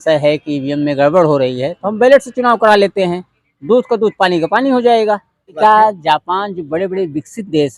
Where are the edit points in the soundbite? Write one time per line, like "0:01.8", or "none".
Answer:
0:05.6